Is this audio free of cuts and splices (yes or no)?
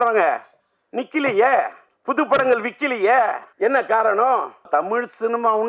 no